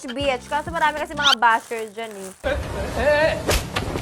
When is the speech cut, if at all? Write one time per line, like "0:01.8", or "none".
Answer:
none

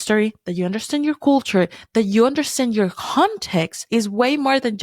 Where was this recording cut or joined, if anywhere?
0:03.8

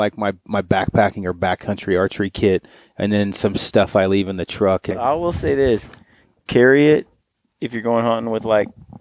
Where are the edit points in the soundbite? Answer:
0:05.0

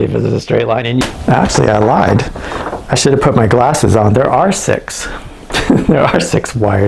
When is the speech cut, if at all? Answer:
0:01.0

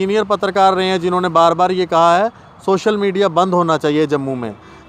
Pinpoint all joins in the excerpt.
none

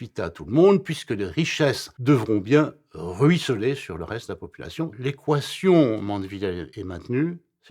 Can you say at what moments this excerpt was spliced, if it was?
0:01.9
0:04.9
0:06.7

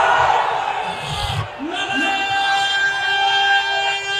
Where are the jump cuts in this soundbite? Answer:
none

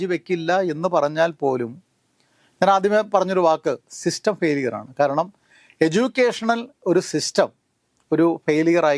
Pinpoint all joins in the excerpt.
none

